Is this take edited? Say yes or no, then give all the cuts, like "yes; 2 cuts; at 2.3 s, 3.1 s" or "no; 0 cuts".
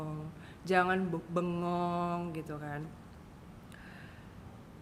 no; 0 cuts